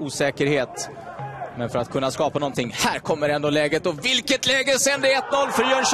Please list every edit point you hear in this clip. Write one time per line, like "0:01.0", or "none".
none